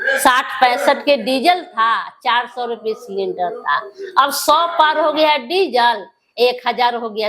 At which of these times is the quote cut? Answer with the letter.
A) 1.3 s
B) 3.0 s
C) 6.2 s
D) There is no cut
D